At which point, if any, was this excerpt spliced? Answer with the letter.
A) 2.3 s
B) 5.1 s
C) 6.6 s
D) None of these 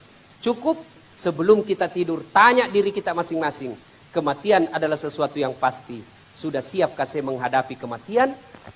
D